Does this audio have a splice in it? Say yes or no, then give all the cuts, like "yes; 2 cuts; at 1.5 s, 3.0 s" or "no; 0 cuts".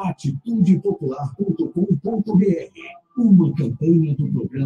no; 0 cuts